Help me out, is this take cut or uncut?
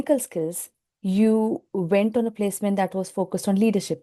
uncut